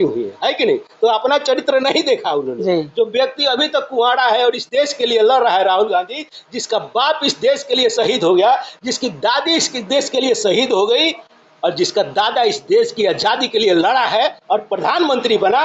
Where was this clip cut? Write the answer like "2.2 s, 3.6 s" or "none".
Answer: none